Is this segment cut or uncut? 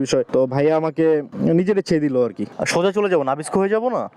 cut